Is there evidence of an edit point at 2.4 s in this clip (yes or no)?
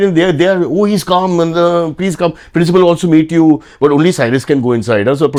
no